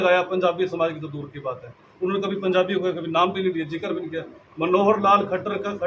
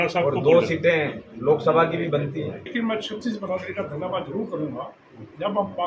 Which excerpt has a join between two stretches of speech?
second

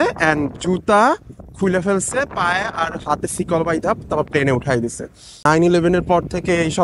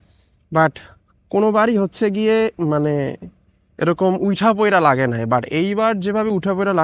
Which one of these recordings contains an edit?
first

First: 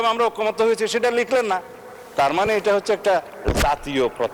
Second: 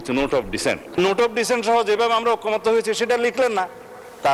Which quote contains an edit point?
second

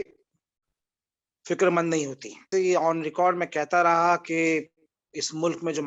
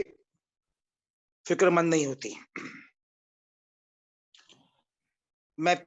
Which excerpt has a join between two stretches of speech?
first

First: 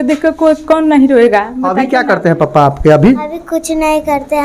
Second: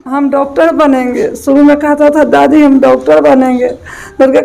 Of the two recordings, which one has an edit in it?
first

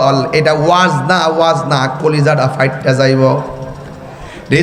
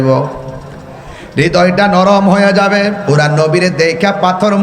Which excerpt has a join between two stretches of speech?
second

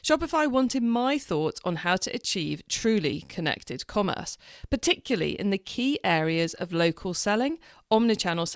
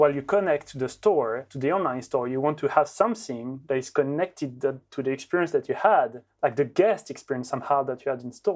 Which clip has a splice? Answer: second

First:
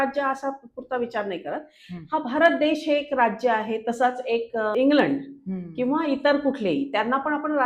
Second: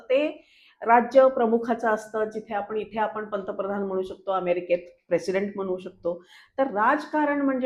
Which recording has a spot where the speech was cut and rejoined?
first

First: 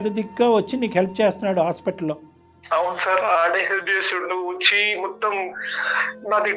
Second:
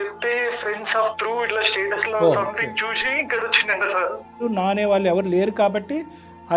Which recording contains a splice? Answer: second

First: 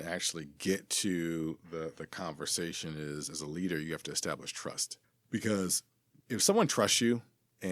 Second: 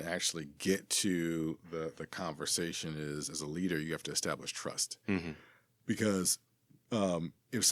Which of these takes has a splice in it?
first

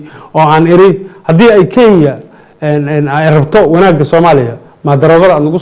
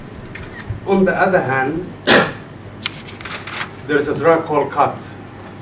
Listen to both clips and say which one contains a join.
second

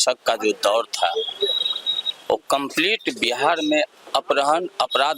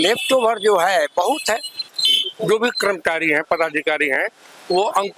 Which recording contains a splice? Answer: second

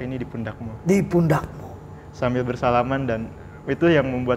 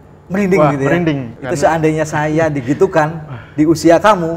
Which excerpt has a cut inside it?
second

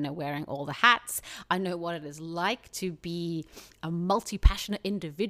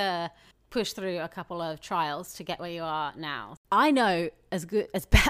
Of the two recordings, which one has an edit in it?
second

